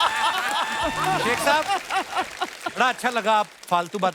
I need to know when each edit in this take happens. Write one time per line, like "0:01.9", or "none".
0:01.3